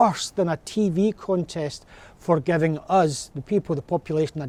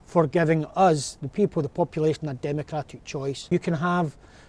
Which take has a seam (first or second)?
second